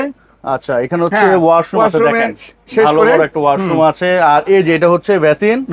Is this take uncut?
yes; 0 cuts

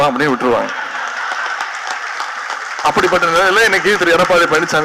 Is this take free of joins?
yes; 0 cuts

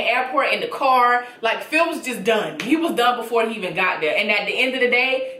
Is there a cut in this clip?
no; 0 cuts

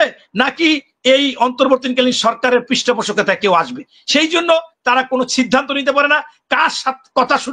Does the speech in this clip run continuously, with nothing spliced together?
yes; 0 cuts

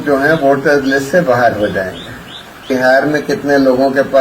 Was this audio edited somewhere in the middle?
yes; 1 cut; at 2.7 s

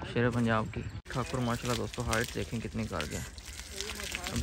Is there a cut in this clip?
yes; 1 cut; at 1.0 s

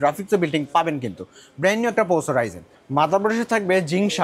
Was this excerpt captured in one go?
yes; 0 cuts

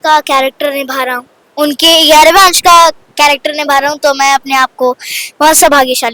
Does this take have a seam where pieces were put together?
no; 0 cuts

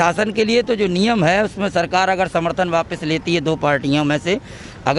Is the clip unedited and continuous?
yes; 0 cuts

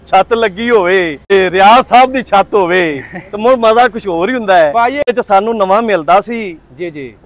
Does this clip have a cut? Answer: yes; 2 cuts; at 1.3 s, 5.1 s

